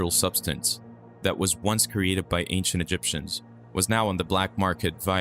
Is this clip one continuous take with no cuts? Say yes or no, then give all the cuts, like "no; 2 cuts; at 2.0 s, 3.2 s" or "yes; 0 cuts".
yes; 0 cuts